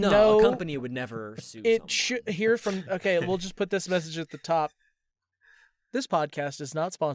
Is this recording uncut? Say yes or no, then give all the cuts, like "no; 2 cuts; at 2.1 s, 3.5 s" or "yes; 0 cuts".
yes; 0 cuts